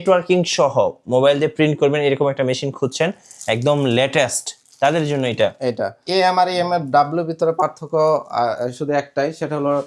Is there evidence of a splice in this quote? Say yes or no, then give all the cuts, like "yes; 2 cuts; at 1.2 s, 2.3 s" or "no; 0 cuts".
yes; 1 cut; at 6.0 s